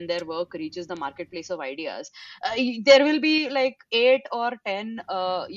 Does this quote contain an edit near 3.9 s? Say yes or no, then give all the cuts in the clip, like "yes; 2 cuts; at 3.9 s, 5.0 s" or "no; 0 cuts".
no; 0 cuts